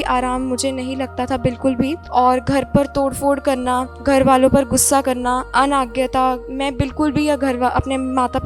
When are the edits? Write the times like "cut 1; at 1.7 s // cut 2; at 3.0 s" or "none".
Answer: cut 1; at 2.0 s // cut 2; at 3.9 s // cut 3; at 5.5 s // cut 4; at 6.5 s